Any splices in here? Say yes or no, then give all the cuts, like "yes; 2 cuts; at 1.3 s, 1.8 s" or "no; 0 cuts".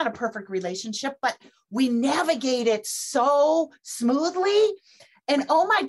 no; 0 cuts